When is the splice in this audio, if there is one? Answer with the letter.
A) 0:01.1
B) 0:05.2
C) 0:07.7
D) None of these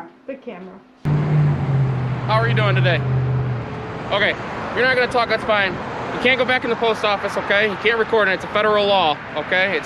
A